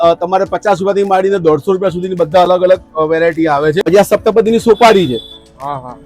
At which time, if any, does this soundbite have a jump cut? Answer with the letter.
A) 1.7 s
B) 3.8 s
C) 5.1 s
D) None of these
B